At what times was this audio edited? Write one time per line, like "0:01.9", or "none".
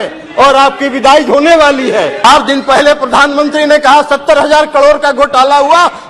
0:02.2